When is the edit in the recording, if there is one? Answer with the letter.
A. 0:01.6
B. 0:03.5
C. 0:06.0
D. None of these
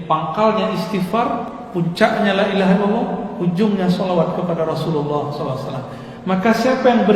A